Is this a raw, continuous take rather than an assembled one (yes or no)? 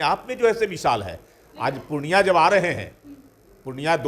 yes